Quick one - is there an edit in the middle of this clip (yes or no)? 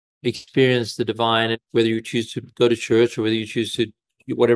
yes